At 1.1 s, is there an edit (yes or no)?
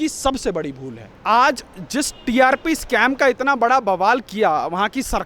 yes